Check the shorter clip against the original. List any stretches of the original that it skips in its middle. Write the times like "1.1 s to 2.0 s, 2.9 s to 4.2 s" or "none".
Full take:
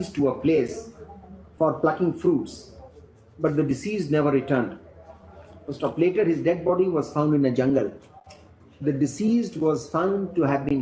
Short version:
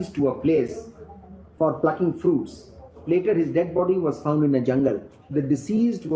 3.0 s to 5.9 s, 8.0 s to 8.6 s